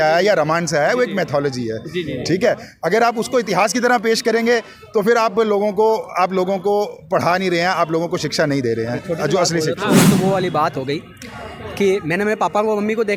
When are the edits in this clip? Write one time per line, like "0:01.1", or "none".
none